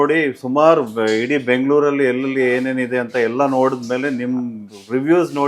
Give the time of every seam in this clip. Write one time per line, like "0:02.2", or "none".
none